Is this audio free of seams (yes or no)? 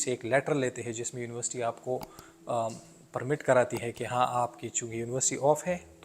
yes